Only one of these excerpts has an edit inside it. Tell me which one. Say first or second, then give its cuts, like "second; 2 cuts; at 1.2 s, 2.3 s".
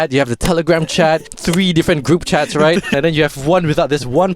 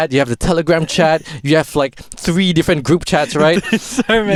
first; 2 cuts; at 1.3 s, 2.9 s